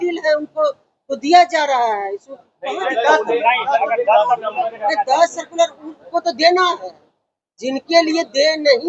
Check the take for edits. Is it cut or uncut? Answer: uncut